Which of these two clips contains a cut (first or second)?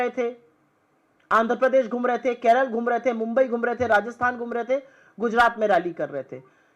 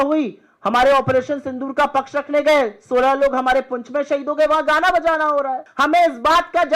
second